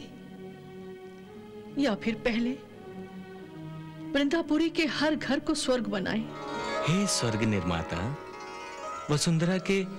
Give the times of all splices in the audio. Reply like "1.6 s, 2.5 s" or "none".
6.5 s